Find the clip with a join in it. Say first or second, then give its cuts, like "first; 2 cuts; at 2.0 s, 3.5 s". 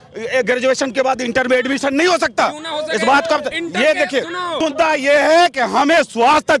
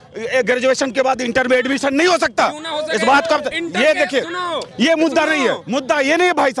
first; 1 cut; at 4.5 s